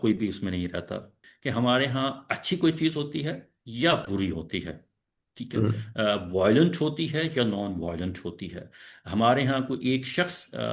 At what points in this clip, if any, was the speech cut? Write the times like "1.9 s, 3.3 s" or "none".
1.3 s